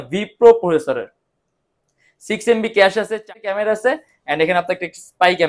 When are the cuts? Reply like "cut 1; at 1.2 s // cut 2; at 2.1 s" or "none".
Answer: cut 1; at 3.1 s